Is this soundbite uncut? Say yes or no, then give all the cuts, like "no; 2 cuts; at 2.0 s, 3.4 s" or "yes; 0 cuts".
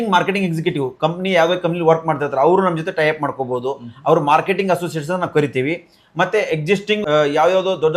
no; 1 cut; at 7.0 s